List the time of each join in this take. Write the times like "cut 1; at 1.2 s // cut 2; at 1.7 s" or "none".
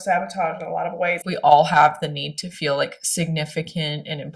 cut 1; at 1.2 s